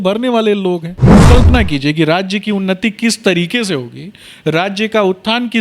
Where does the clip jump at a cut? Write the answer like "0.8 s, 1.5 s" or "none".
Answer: 1.2 s